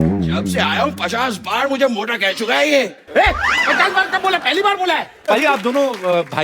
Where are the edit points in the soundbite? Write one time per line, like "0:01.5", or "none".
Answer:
0:05.3

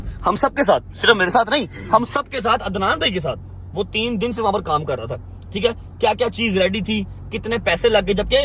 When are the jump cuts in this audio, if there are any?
none

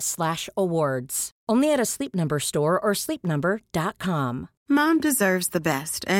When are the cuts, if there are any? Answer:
0:04.5

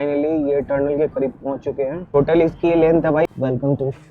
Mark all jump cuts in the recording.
0:02.1
0:03.3

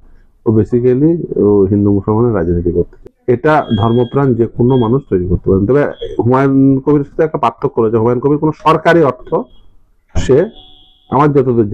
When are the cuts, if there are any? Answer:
0:03.0

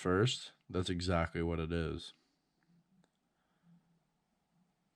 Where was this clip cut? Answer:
none

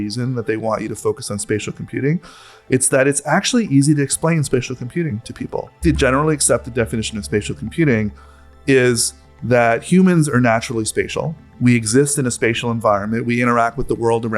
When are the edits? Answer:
0:05.8
0:08.6

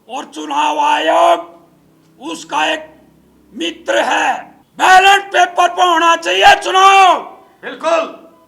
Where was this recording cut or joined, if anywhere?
0:04.6

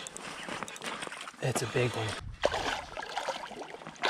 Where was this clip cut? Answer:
0:02.1

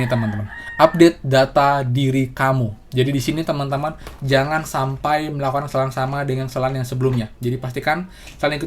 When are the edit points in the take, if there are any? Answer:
none

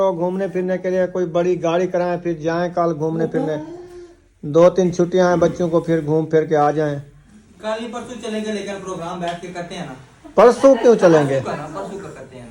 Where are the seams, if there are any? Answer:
none

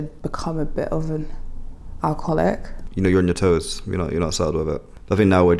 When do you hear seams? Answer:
0:02.8

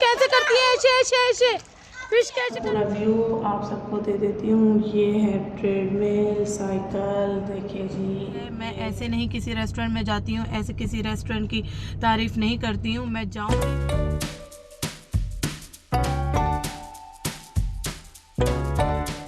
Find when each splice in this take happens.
0:02.3
0:08.8
0:13.3

